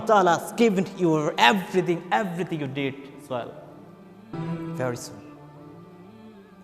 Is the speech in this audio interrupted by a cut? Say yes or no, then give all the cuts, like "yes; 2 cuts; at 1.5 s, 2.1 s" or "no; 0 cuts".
yes; 1 cut; at 4.3 s